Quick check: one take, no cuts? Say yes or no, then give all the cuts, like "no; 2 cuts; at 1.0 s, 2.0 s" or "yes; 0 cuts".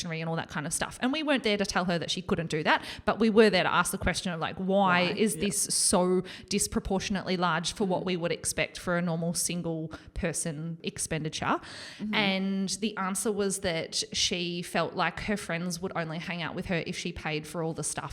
no; 1 cut; at 10.8 s